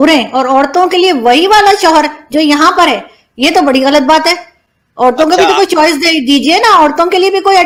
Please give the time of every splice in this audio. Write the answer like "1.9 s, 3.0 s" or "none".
none